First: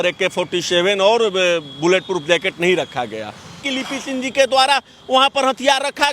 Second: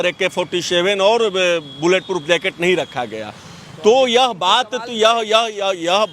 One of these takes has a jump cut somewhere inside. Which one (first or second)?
first